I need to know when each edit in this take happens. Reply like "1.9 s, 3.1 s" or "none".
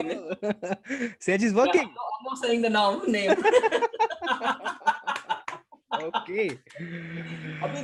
none